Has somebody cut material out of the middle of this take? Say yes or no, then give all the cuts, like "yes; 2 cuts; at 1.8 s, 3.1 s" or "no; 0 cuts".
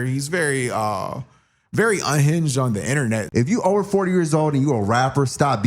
yes; 1 cut; at 3.3 s